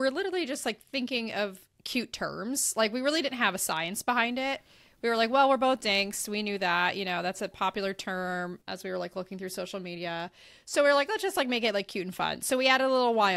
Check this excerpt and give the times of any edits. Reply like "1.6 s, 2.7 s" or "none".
none

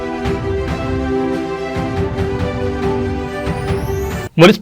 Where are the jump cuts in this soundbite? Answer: 3.0 s

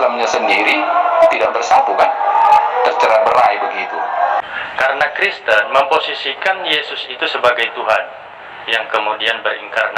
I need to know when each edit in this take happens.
4.4 s

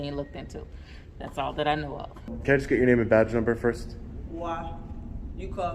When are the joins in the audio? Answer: 2.3 s

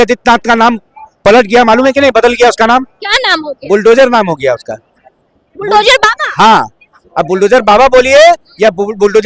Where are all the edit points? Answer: none

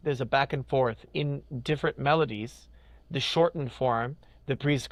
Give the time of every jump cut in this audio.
none

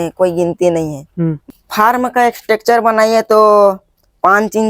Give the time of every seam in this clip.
1.4 s

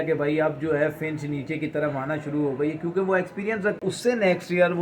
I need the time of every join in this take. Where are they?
3.8 s

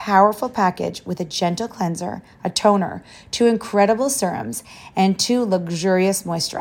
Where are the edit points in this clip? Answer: none

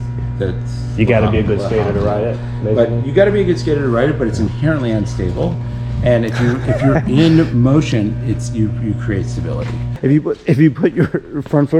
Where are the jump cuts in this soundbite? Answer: 9.8 s

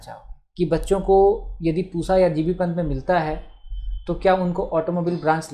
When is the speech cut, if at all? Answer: none

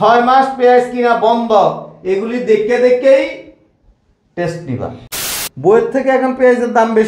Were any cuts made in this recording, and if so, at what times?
5.1 s

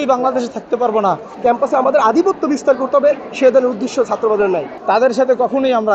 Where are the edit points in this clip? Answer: 1.3 s, 4.7 s

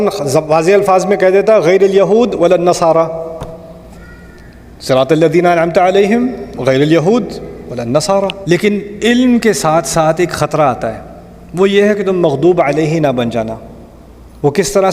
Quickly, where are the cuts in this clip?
8.4 s

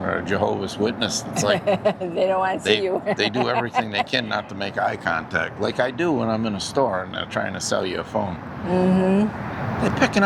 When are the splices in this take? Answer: none

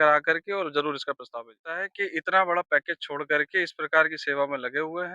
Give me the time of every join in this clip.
1.8 s

